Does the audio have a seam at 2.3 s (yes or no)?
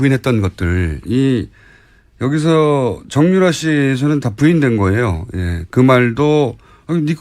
no